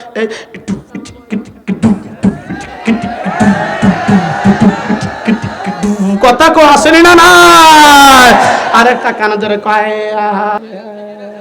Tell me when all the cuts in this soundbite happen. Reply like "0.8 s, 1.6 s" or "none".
none